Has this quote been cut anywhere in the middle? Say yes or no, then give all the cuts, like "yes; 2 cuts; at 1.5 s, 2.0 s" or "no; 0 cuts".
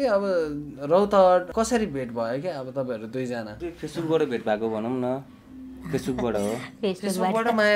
yes; 2 cuts; at 1.5 s, 3.6 s